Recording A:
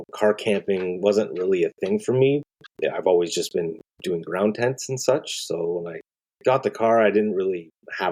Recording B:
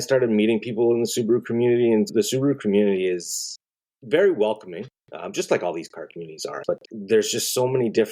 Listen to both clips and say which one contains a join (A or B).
A